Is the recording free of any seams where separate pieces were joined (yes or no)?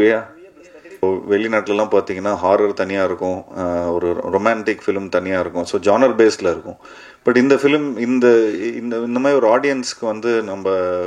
no